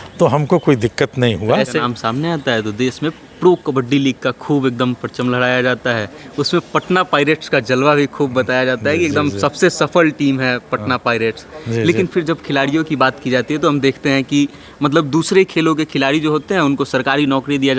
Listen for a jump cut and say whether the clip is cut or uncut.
cut